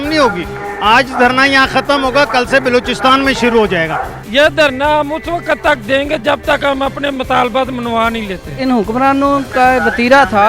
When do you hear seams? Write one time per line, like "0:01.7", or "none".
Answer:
0:04.1
0:08.6